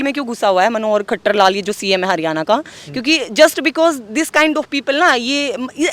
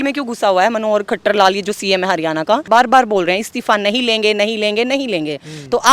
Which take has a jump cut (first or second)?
second